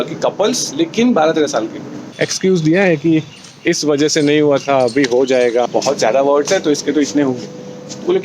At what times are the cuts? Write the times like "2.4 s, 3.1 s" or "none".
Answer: 2.0 s, 5.7 s